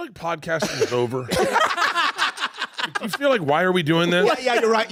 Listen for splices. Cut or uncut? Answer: uncut